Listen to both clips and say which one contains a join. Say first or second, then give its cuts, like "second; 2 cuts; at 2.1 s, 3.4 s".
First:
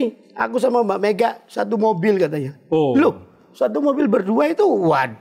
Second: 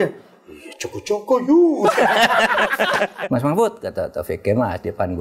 second; 1 cut; at 3.2 s